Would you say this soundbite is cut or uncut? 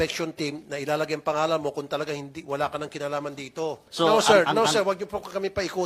cut